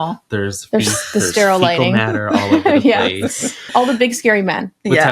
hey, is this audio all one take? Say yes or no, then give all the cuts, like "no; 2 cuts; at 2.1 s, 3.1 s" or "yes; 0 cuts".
no; 1 cut; at 3.5 s